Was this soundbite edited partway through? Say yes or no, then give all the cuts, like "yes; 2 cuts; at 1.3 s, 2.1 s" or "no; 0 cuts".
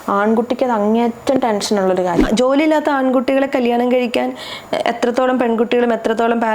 yes; 1 cut; at 2.2 s